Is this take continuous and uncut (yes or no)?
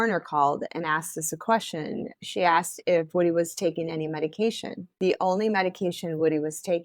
no